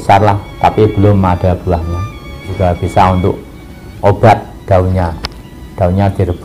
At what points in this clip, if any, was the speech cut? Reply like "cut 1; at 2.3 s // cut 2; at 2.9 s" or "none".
cut 1; at 2.5 s

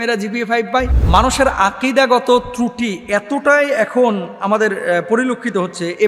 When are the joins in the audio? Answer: cut 1; at 1.0 s

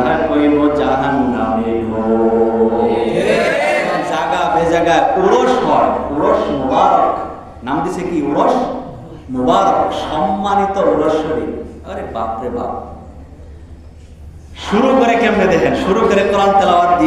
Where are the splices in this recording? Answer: cut 1; at 4.0 s

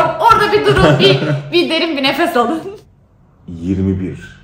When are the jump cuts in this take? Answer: cut 1; at 2.7 s

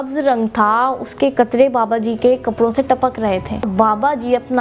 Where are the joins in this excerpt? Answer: cut 1; at 3.7 s

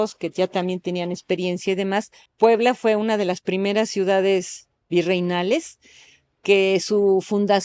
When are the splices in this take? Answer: cut 1; at 2.2 s

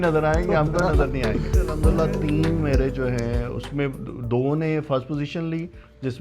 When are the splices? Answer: cut 1; at 1.8 s

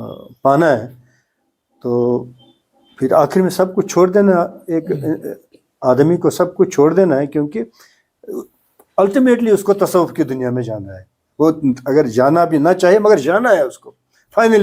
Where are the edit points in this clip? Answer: none

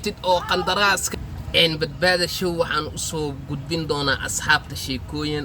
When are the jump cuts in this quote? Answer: cut 1; at 1.1 s

